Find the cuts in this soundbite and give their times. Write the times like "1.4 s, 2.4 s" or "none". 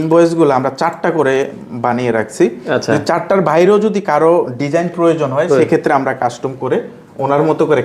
none